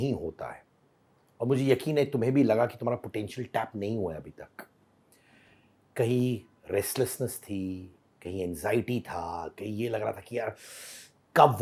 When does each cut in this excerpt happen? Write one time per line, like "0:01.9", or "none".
none